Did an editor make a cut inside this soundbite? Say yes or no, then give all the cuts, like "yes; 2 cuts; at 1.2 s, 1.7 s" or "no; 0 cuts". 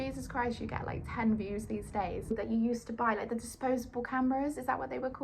yes; 1 cut; at 2.3 s